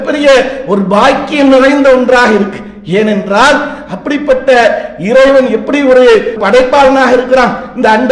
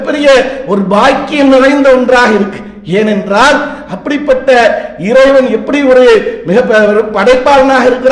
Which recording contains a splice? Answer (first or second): first